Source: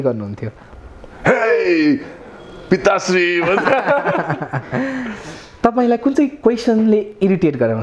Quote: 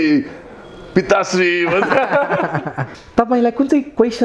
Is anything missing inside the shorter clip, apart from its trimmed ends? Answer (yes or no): yes